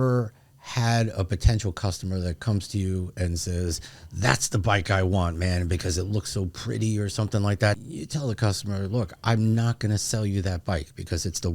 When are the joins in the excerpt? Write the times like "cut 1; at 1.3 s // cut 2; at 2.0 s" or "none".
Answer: cut 1; at 7.8 s

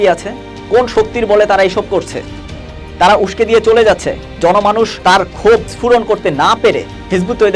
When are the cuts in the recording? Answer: cut 1; at 4.9 s // cut 2; at 5.7 s

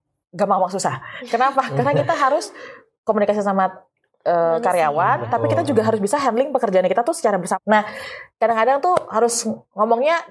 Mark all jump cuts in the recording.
cut 1; at 7.5 s

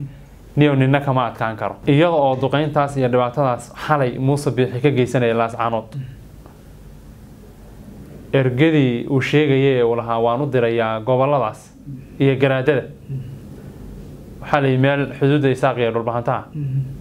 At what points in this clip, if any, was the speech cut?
cut 1; at 1.8 s

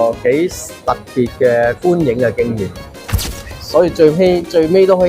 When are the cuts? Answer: cut 1; at 3.2 s

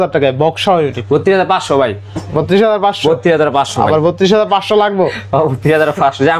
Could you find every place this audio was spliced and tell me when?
none

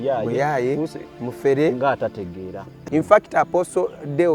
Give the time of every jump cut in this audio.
cut 1; at 2.7 s

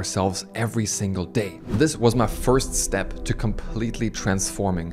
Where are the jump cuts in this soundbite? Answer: cut 1; at 1.6 s

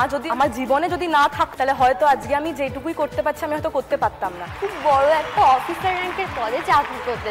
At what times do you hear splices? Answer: cut 1; at 1.5 s // cut 2; at 4.5 s

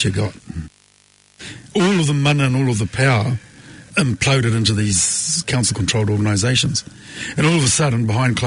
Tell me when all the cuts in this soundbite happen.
cut 1; at 1.0 s // cut 2; at 3.9 s

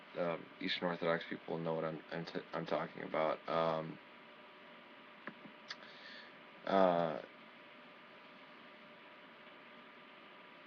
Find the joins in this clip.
cut 1; at 7.2 s

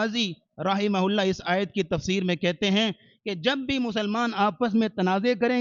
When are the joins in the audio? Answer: none

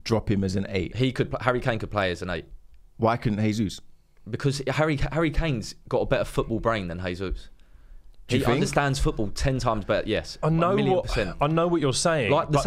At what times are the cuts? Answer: none

